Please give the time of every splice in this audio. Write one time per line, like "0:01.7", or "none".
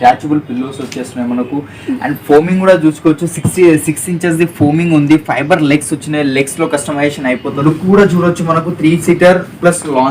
0:07.5